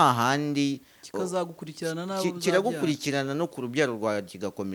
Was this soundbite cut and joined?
no; 0 cuts

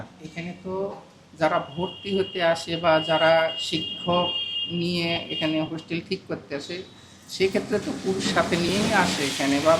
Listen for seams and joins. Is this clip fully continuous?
yes; 0 cuts

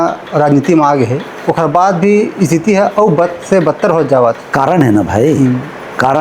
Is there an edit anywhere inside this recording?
no; 0 cuts

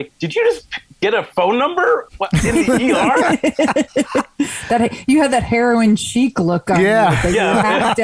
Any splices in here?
no; 0 cuts

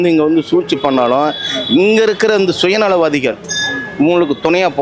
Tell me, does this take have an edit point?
no; 0 cuts

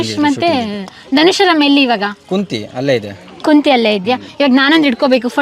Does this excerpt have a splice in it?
no; 0 cuts

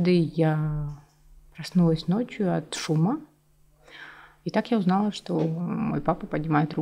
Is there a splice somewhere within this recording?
no; 0 cuts

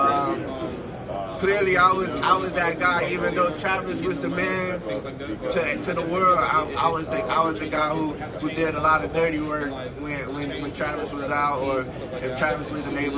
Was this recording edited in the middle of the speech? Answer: no; 0 cuts

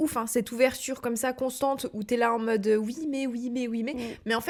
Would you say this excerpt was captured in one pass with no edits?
yes; 0 cuts

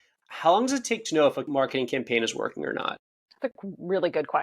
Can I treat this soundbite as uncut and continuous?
no; 1 cut; at 1.4 s

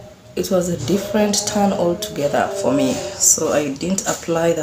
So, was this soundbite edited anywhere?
no; 0 cuts

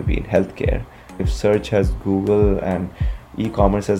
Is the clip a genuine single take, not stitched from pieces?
yes; 0 cuts

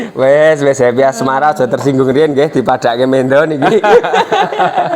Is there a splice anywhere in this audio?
no; 0 cuts

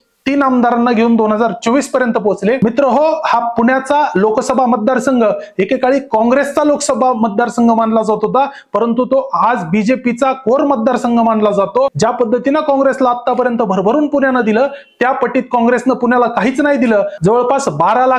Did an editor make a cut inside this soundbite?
yes; 3 cuts; at 2.6 s, 11.9 s, 17.1 s

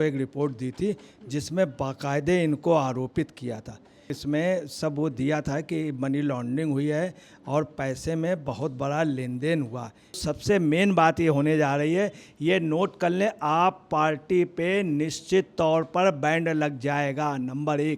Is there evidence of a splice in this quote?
yes; 2 cuts; at 4.1 s, 10.2 s

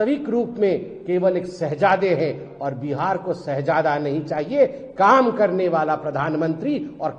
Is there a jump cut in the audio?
no; 0 cuts

